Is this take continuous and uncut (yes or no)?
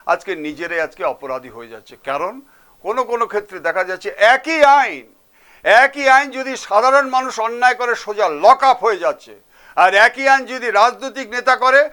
yes